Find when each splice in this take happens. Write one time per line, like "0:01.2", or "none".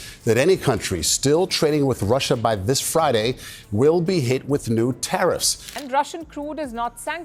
0:05.6

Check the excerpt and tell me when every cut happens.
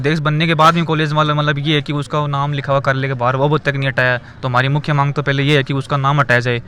none

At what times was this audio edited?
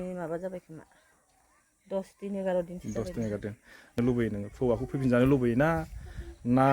0:04.0

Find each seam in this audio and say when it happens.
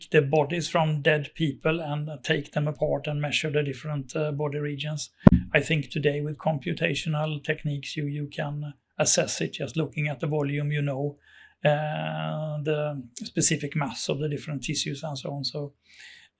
none

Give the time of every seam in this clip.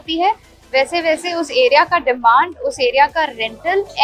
none

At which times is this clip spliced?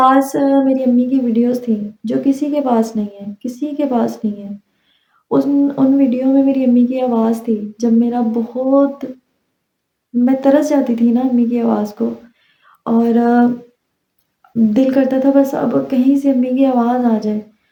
none

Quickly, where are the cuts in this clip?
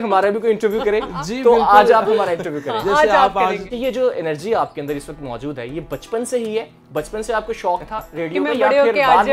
0:03.7

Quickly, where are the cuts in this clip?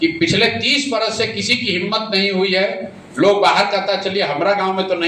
none

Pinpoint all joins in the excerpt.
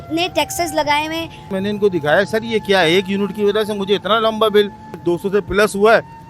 0:01.5
0:04.9

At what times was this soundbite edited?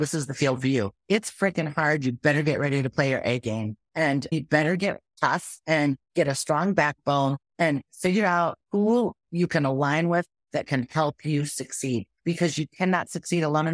0:01.0
0:04.1
0:05.1
0:06.0
0:07.4
0:12.1

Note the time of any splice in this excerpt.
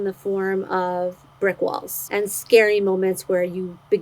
0:01.9

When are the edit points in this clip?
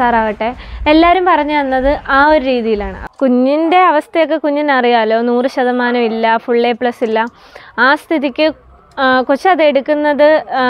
0:03.0

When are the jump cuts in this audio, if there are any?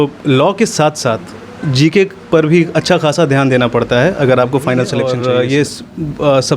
0:05.0

